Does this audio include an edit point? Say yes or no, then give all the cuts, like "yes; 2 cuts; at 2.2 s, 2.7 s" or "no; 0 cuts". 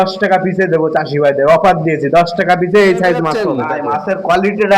yes; 1 cut; at 3.6 s